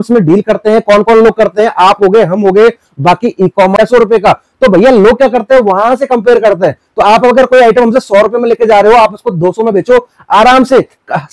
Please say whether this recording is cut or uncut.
uncut